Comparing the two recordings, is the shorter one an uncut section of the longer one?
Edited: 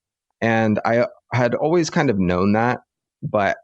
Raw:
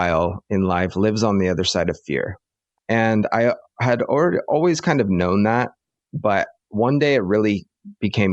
no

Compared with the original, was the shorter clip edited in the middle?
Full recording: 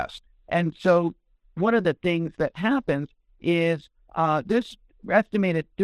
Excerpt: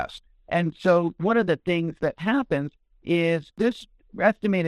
yes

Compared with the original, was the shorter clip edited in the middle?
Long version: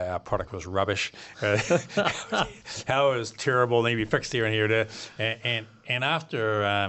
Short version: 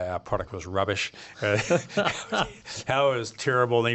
no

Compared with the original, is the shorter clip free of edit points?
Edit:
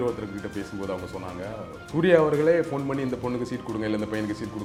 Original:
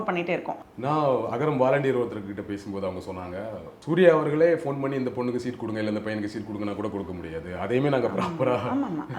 yes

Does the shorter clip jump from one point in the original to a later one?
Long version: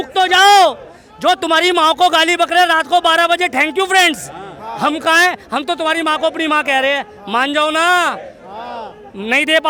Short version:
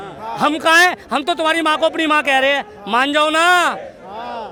no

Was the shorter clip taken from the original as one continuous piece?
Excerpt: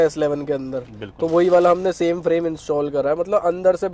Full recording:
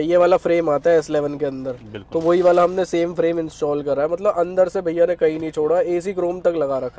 yes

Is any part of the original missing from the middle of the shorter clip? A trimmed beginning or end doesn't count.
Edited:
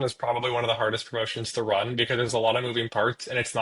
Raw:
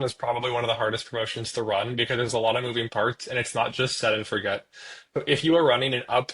no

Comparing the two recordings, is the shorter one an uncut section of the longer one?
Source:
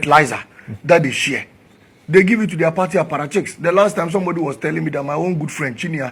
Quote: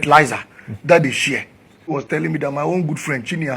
no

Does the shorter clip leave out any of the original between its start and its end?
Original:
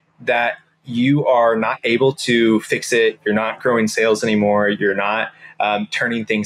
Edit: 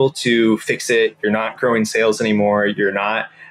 no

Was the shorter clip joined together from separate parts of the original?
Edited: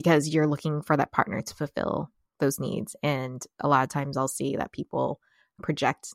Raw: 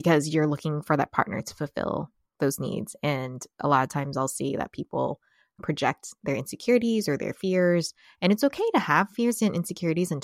no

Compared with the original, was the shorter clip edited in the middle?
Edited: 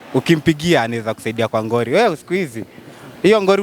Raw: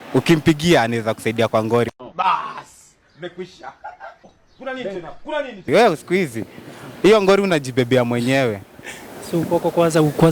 yes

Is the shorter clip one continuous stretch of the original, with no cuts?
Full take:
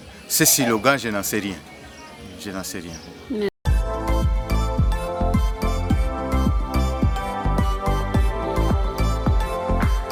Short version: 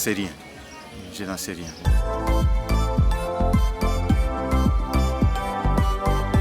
no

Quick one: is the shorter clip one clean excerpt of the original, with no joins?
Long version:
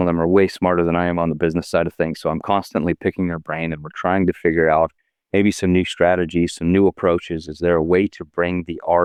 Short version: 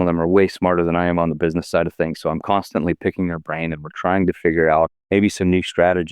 no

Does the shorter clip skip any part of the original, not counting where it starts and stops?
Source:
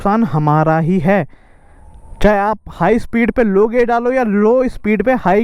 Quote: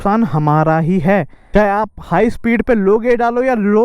yes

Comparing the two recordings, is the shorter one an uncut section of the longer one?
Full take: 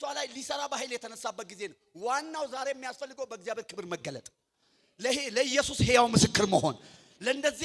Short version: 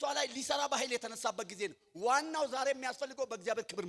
yes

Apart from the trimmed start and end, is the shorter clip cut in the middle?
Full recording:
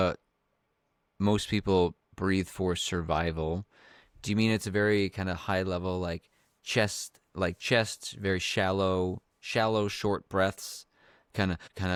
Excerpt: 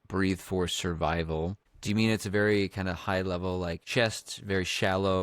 yes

